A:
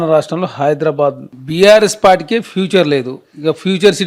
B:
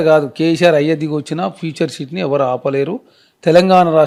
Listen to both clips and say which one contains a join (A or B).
A